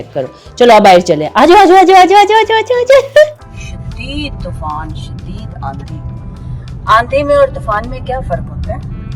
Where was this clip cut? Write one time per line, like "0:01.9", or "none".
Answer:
0:03.4

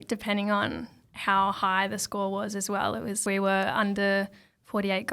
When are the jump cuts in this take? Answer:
0:03.2

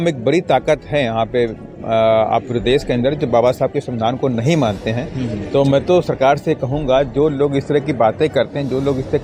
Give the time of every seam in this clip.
none

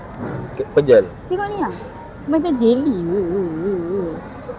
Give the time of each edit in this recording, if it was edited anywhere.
none

